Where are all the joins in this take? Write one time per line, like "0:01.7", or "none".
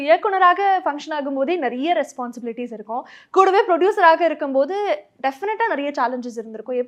none